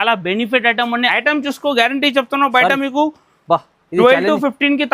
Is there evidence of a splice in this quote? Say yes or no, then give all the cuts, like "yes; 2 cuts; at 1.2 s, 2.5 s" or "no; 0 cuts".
yes; 1 cut; at 1.1 s